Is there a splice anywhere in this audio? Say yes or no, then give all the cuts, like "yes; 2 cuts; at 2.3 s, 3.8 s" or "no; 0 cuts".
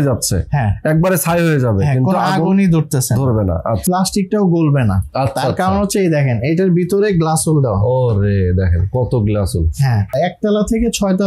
yes; 2 cuts; at 3.8 s, 10.1 s